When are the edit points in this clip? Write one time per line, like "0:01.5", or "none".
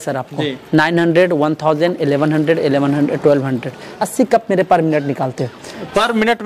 0:04.0

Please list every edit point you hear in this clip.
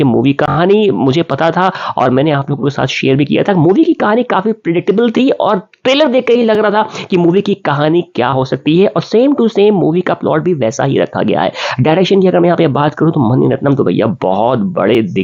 none

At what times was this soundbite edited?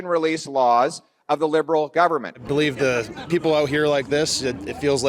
0:02.4

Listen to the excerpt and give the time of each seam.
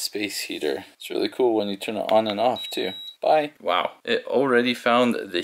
0:03.5

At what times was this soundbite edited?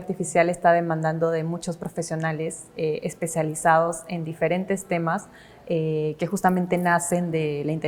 none

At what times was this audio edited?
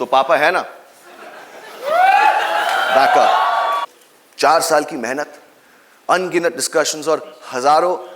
0:03.8

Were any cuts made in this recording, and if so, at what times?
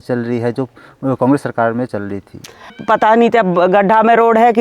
0:02.8

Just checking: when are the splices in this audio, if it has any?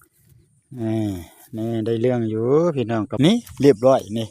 0:03.3

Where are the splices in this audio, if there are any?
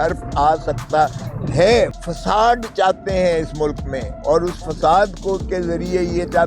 0:01.9

